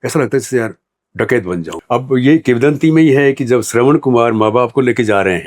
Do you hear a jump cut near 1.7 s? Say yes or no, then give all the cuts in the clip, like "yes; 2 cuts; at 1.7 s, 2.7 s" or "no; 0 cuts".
yes; 1 cut; at 1.7 s